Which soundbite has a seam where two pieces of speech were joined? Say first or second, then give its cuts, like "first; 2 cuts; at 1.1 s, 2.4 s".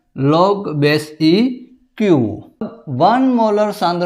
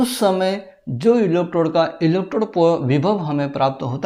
first; 1 cut; at 2.7 s